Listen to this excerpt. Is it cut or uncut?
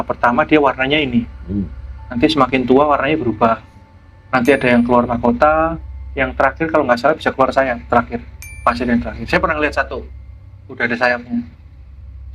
uncut